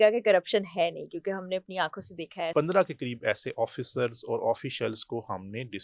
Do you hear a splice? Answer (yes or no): yes